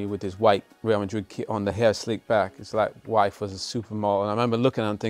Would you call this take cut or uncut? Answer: uncut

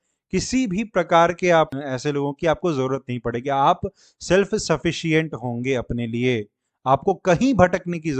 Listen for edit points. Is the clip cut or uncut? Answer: cut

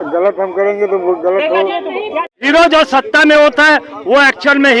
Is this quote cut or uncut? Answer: cut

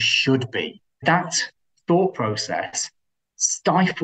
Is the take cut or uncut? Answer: cut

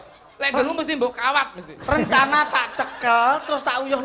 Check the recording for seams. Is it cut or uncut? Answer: uncut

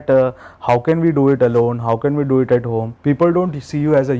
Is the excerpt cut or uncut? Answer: cut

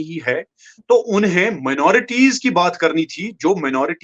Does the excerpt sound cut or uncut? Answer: uncut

